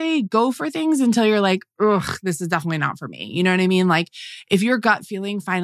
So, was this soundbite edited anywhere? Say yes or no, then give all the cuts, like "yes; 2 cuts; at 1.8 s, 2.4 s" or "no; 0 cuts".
no; 0 cuts